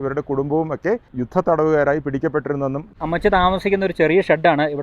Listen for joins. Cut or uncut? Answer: cut